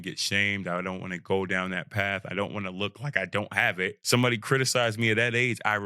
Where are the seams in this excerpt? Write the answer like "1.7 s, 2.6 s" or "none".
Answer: 4.0 s